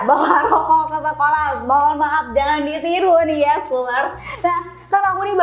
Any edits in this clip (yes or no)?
no